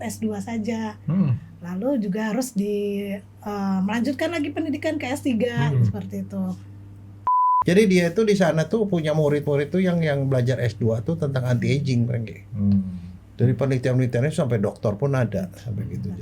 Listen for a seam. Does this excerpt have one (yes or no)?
yes